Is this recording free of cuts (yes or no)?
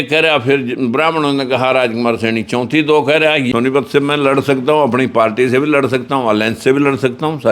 no